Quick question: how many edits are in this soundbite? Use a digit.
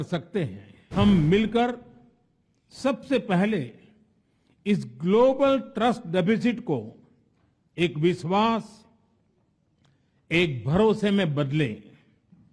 1